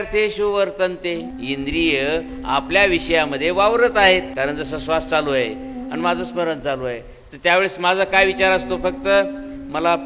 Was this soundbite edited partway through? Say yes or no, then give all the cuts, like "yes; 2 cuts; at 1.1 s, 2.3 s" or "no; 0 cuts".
yes; 2 cuts; at 1.3 s, 4.3 s